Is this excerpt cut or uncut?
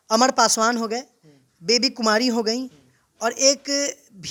uncut